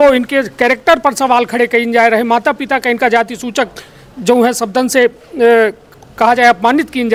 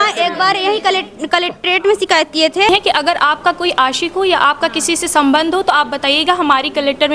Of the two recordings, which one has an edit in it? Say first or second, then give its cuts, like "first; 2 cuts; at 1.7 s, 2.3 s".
second; 1 cut; at 2.7 s